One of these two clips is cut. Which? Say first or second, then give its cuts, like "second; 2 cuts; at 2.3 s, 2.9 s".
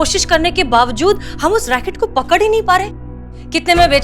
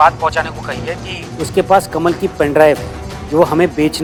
first; 1 cut; at 3.1 s